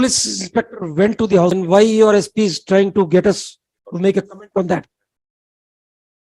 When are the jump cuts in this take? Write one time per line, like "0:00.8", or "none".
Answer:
0:01.5